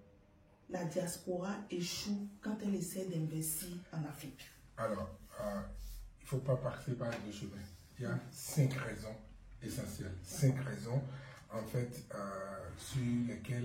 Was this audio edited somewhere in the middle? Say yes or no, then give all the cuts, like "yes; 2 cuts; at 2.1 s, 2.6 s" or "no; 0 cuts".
no; 0 cuts